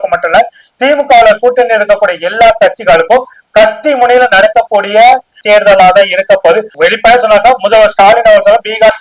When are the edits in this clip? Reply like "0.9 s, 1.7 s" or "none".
5.4 s, 6.7 s